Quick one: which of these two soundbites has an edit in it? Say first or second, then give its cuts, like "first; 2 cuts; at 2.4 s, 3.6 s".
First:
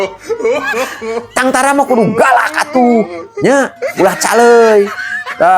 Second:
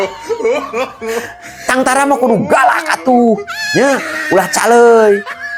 first; 1 cut; at 1.3 s